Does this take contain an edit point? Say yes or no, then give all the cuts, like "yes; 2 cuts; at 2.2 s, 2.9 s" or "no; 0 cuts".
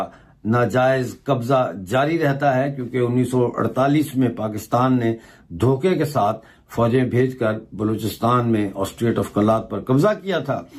no; 0 cuts